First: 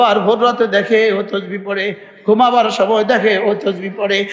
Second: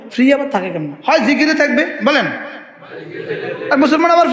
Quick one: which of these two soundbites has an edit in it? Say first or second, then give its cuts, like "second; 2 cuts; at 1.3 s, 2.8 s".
second; 1 cut; at 0.9 s